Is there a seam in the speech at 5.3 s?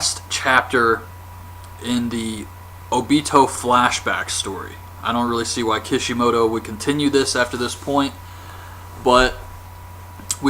no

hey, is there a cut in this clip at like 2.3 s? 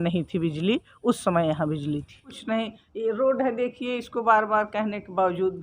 yes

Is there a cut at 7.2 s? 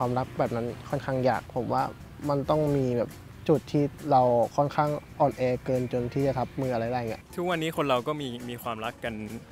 yes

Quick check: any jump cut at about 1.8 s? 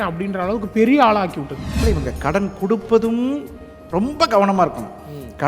yes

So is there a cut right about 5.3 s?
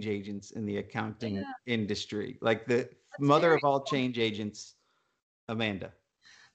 no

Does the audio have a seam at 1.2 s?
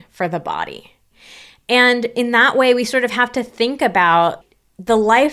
no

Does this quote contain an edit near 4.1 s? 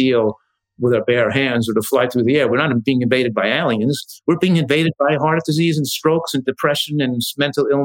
no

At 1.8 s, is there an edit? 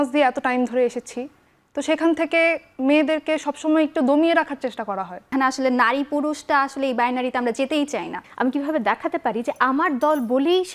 no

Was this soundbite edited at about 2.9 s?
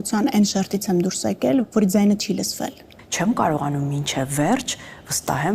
yes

